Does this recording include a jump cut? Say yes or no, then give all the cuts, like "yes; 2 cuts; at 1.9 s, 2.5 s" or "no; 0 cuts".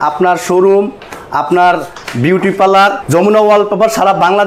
yes; 1 cut; at 3.0 s